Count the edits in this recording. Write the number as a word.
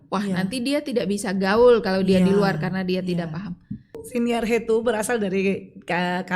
one